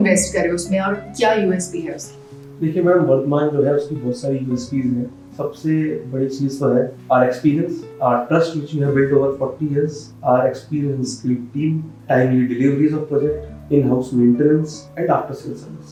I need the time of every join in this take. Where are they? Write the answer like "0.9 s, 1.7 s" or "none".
none